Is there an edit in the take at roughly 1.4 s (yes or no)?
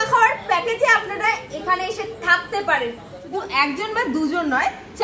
no